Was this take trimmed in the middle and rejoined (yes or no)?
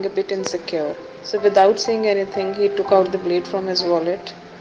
yes